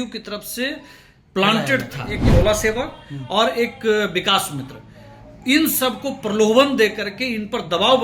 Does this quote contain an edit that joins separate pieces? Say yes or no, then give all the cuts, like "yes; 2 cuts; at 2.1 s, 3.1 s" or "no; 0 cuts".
yes; 1 cut; at 2.1 s